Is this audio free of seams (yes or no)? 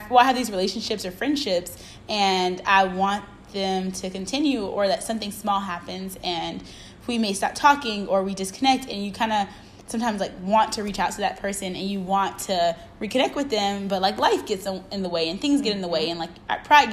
yes